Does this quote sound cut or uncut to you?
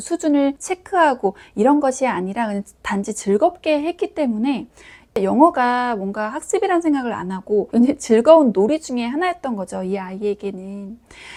uncut